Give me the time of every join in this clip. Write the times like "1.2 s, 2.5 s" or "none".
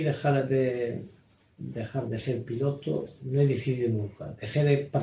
none

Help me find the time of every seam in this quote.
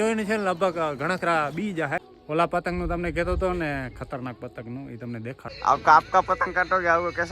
2.1 s, 5.4 s

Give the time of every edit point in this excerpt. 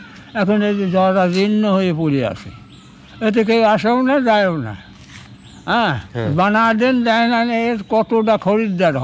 none

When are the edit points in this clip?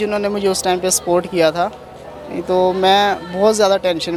none

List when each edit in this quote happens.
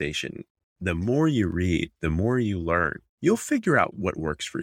3.0 s, 3.9 s

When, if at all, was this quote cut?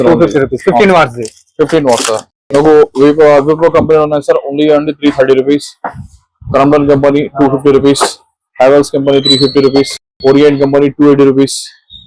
none

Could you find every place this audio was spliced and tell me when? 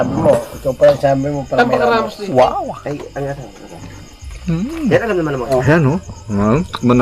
5.5 s

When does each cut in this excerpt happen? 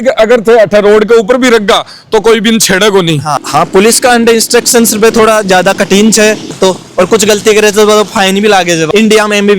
3.3 s, 6.5 s, 8.9 s

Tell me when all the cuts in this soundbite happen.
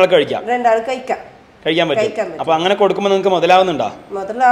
none

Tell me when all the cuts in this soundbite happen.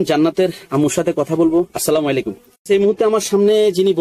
2.5 s

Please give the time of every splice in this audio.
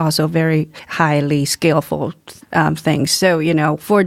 none

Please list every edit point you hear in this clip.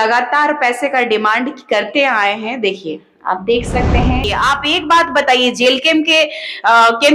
4.2 s

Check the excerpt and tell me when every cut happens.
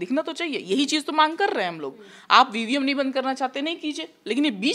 none

